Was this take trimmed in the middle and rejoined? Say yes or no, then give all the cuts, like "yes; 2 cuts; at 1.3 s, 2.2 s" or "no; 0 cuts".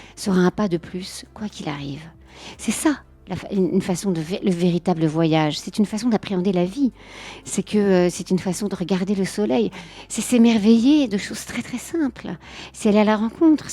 yes; 1 cut; at 9.9 s